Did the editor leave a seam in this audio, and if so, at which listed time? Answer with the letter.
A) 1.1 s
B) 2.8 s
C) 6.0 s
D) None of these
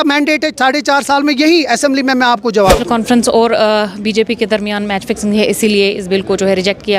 B